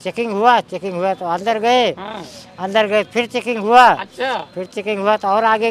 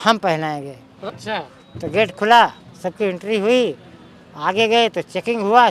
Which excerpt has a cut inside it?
second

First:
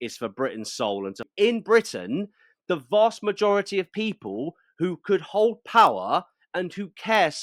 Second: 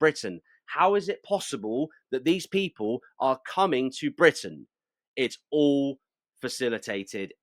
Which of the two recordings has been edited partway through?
first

